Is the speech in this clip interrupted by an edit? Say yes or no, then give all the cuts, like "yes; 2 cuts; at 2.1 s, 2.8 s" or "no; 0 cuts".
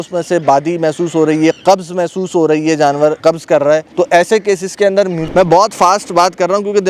yes; 2 cuts; at 3.4 s, 5.2 s